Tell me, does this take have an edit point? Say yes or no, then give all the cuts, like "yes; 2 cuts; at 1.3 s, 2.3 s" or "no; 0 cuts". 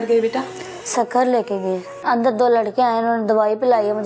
yes; 1 cut; at 1.9 s